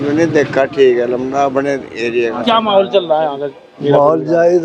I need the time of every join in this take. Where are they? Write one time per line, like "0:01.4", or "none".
0:02.4